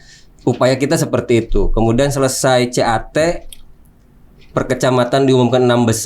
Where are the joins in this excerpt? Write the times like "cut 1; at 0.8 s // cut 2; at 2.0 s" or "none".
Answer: none

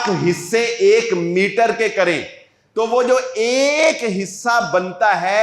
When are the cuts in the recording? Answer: none

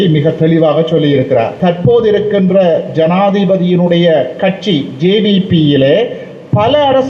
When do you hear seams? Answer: cut 1; at 1.5 s

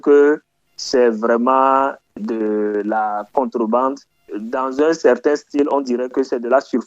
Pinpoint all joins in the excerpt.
cut 1; at 2.1 s // cut 2; at 4.3 s

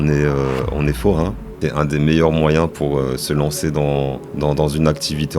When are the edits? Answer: cut 1; at 1.6 s // cut 2; at 4.2 s

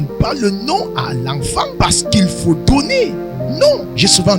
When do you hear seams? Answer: cut 1; at 1.7 s

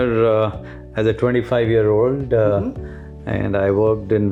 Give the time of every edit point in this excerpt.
none

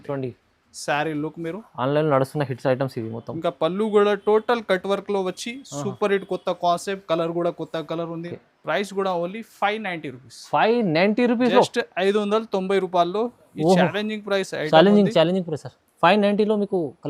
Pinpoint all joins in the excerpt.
cut 1; at 8.3 s

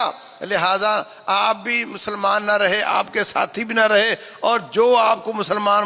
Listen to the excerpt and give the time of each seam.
none

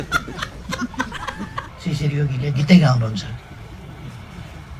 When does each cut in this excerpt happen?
cut 1; at 1.7 s

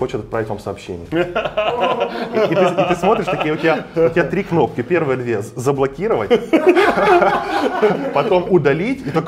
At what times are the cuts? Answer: none

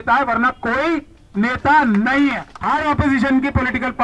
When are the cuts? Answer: cut 1; at 2.5 s

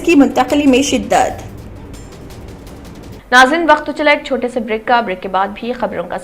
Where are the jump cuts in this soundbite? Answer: cut 1; at 3.2 s

